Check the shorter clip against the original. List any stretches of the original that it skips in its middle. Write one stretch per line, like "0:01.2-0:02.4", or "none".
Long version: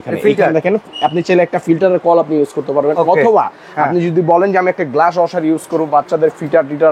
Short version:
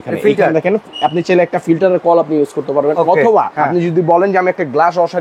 0:03.5-0:03.7